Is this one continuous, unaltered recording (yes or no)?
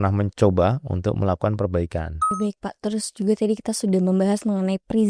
no